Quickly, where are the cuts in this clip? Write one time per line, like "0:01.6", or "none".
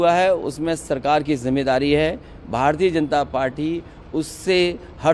none

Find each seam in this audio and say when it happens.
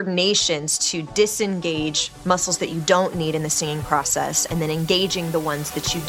none

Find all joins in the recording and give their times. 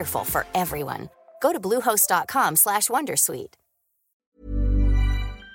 0:04.3

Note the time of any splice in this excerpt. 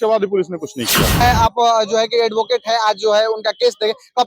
0:01.2

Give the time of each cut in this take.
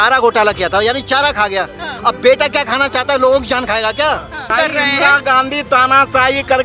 0:04.5

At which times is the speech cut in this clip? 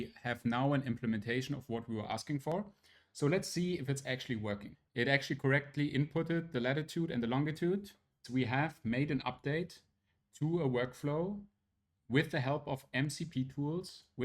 0:04.7
0:08.2

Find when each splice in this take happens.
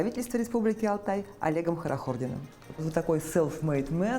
0:02.7

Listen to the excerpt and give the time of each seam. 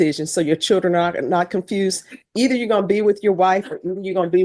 none

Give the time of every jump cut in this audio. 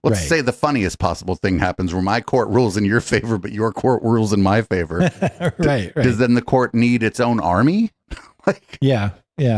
none

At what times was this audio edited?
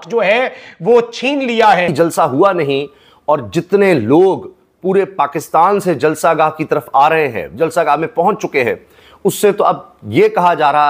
0:01.9

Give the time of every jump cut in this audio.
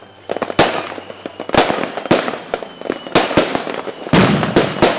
none

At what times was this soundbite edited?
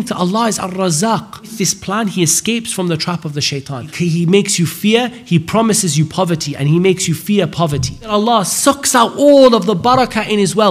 0:01.5
0:03.9
0:08.1

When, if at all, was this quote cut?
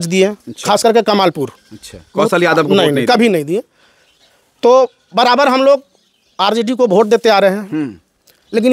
none

